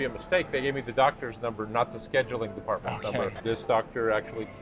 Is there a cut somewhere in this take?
yes; 1 cut; at 3.4 s

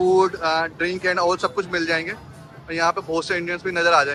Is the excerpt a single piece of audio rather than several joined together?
yes; 0 cuts

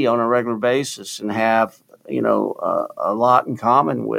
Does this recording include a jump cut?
no; 0 cuts

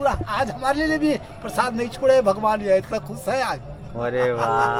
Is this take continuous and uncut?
yes; 0 cuts

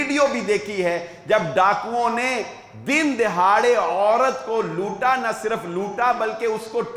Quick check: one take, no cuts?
yes; 0 cuts

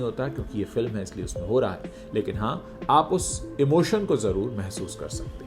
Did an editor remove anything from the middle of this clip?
no; 0 cuts

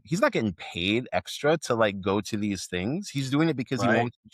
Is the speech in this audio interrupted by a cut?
no; 0 cuts

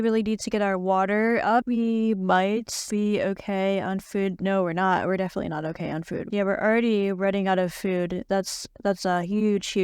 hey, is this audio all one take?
no; 2 cuts; at 1.6 s, 6.2 s

